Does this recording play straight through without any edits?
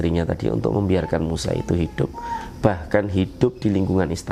yes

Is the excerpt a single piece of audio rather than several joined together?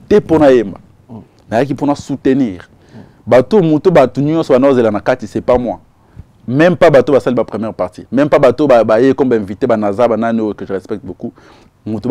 yes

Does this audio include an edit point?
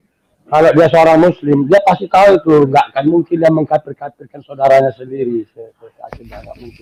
no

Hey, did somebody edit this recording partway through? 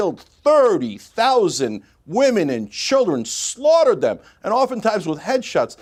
no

